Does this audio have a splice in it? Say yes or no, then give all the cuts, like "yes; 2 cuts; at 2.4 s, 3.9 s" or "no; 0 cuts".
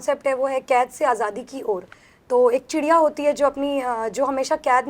no; 0 cuts